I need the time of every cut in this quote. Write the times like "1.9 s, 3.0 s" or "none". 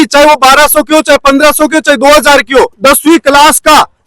2.8 s